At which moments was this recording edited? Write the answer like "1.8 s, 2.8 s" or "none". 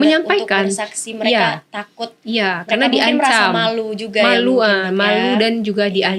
none